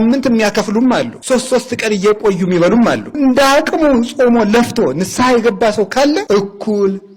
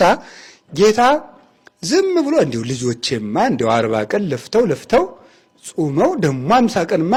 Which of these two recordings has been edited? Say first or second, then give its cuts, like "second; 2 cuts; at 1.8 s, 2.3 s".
first; 3 cuts; at 1.1 s, 3.2 s, 6.2 s